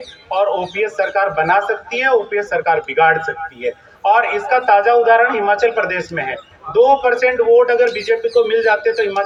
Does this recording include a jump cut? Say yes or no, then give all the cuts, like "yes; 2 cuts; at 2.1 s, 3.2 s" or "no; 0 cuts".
no; 0 cuts